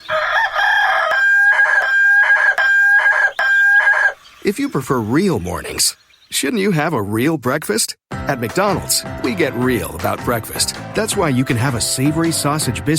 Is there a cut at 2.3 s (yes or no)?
no